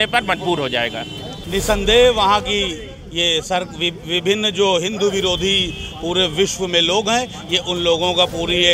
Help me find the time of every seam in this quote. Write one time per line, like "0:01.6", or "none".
0:01.3